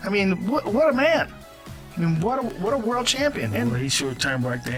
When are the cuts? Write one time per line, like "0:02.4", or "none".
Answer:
none